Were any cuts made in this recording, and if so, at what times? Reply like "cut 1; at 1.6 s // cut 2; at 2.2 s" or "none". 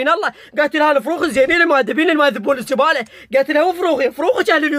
none